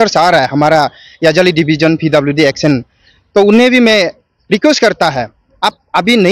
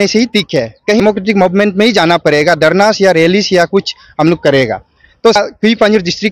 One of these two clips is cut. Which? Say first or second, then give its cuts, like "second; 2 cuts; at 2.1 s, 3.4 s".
second; 2 cuts; at 1.0 s, 5.4 s